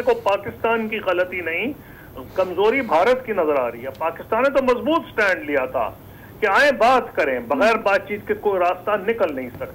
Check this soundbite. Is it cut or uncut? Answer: uncut